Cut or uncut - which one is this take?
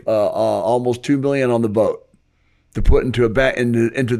uncut